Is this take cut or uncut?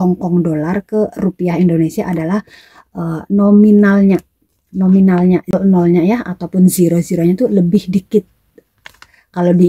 cut